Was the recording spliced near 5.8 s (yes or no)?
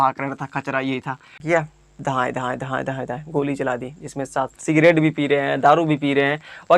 no